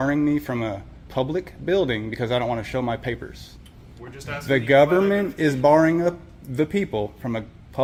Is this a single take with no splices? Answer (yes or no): yes